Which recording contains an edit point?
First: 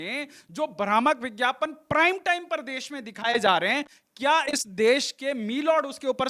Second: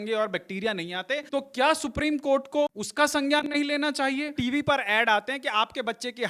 second; 3 cuts; at 1.2 s, 2.8 s, 4.3 s

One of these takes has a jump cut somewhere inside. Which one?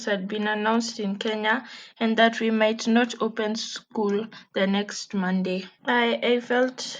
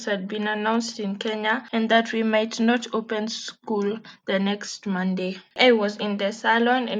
second; 2 cuts; at 1.6 s, 5.4 s

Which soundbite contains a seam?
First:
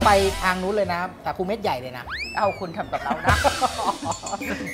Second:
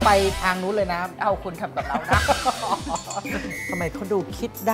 second; 2 cuts; at 1.1 s, 3.5 s

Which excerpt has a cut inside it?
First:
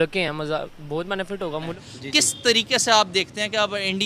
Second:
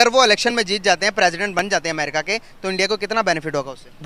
first; 1 cut; at 1.7 s

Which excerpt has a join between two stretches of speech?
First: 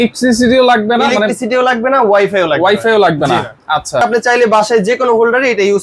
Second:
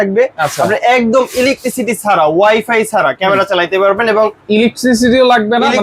first; 1 cut; at 4.0 s

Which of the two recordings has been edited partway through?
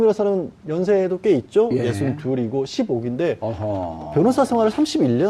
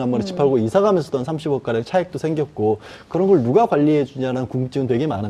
first; 1 cut; at 2.2 s

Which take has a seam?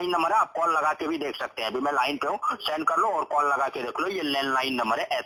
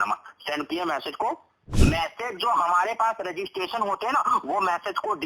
second; 1 cut; at 1.7 s

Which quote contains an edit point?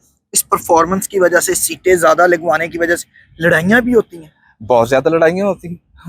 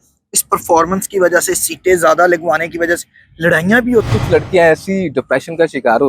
second; 1 cut; at 4.2 s

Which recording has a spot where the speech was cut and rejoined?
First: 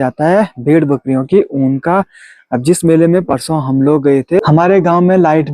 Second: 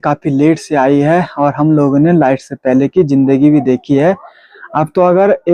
first; 1 cut; at 4.4 s

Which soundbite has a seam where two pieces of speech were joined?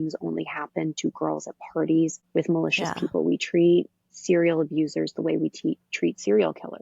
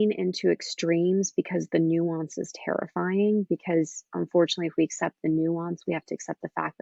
first; 1 cut; at 2.2 s

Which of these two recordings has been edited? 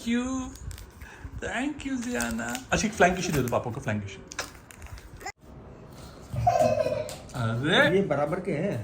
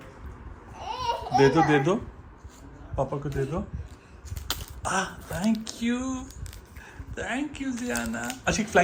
first; 1 cut; at 5.2 s

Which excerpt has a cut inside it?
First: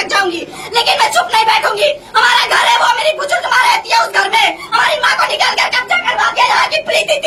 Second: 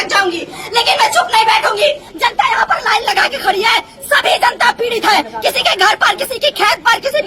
second; 1 cut; at 2.0 s

